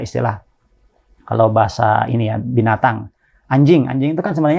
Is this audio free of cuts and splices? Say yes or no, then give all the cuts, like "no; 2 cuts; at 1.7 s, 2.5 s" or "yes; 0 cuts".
yes; 0 cuts